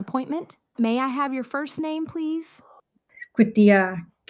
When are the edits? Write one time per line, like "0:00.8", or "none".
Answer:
none